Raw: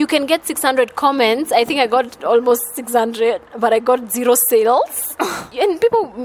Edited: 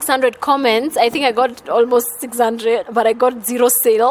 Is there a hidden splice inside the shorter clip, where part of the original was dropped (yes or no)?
yes